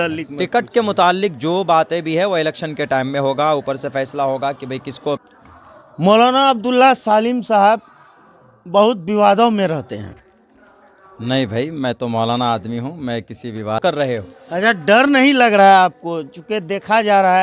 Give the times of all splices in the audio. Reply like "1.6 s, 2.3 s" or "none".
5.2 s, 13.8 s